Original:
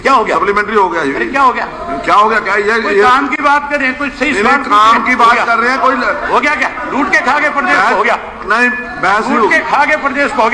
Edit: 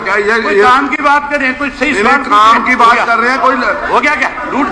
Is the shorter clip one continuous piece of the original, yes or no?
yes